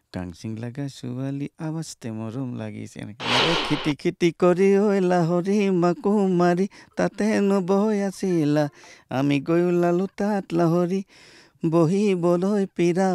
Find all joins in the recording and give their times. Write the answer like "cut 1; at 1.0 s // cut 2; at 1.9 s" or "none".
cut 1; at 3.4 s